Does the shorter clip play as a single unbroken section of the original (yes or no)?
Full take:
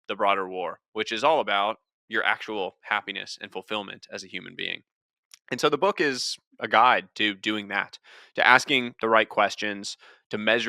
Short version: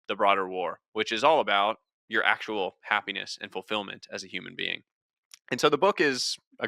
yes